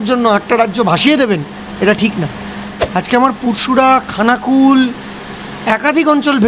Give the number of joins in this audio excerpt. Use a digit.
1